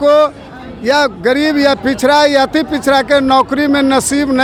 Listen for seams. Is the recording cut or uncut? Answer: uncut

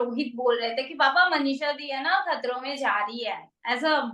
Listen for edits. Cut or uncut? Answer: uncut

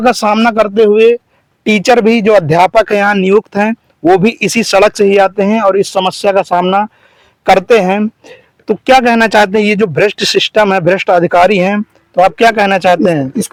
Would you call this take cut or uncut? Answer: uncut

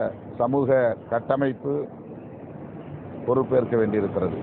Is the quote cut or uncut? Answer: uncut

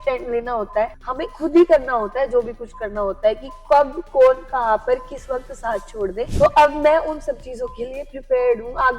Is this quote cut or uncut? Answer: cut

